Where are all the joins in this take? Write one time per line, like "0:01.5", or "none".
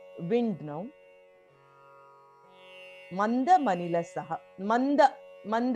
0:01.1
0:02.7